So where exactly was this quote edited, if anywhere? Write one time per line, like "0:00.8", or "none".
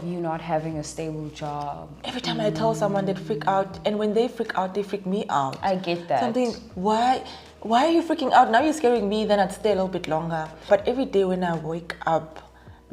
0:10.7